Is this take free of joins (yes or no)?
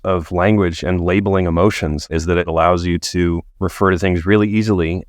no